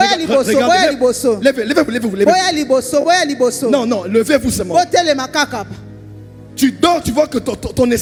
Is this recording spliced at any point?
no; 0 cuts

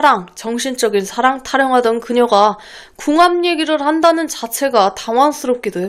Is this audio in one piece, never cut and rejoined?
yes; 0 cuts

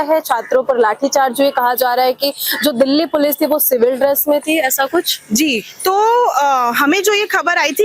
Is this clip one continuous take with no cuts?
yes; 0 cuts

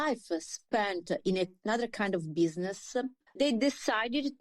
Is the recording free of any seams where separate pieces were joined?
no; 1 cut; at 3.3 s

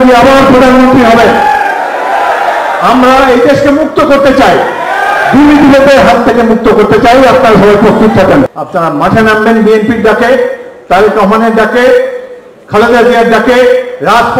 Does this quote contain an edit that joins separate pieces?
yes; 1 cut; at 8.6 s

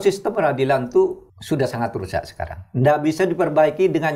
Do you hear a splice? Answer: yes; 1 cut; at 1.3 s

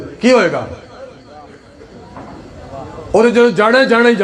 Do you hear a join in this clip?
no; 0 cuts

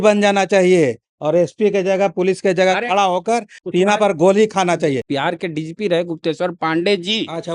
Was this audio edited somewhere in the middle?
yes; 2 cuts; at 3.6 s, 5.0 s

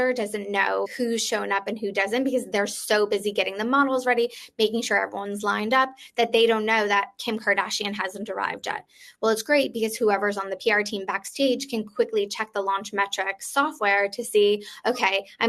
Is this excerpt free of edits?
yes; 0 cuts

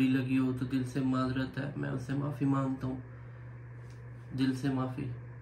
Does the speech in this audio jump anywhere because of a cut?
no; 0 cuts

